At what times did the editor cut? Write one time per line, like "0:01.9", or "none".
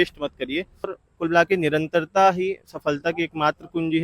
0:01.0